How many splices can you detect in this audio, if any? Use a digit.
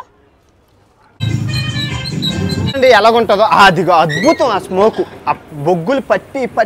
2